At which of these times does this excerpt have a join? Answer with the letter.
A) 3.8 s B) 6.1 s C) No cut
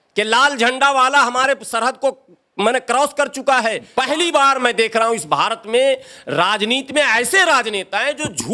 A